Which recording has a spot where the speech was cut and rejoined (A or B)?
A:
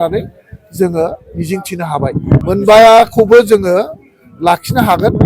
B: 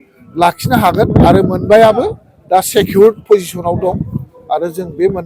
A